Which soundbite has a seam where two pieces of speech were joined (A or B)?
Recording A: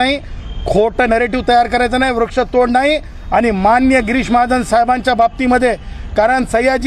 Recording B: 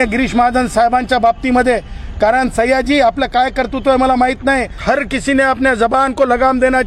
B